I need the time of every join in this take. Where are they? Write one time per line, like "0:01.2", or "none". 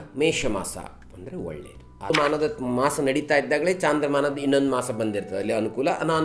0:02.1